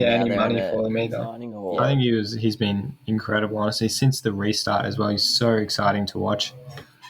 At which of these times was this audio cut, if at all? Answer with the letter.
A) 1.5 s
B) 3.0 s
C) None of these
A